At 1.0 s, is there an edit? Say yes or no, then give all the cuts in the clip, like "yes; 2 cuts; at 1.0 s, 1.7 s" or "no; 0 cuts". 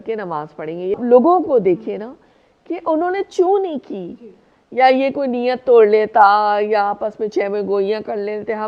yes; 1 cut; at 1.0 s